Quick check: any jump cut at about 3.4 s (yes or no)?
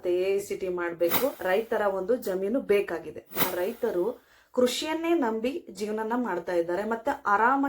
yes